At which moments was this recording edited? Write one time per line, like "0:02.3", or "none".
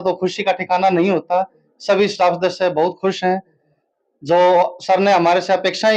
none